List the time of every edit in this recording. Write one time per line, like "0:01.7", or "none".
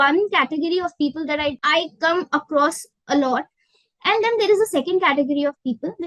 0:01.6